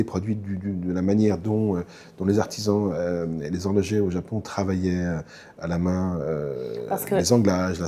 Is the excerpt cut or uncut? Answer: uncut